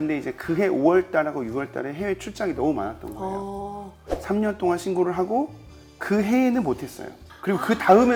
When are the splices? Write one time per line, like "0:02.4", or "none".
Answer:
none